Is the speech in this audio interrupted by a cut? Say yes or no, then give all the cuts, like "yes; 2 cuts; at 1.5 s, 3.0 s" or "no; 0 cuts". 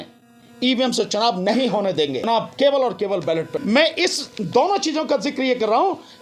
yes; 2 cuts; at 2.3 s, 3.5 s